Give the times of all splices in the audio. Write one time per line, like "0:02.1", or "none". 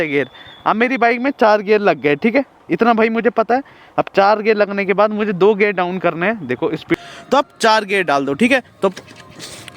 0:06.9